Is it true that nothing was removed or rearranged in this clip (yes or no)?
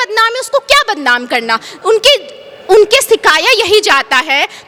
yes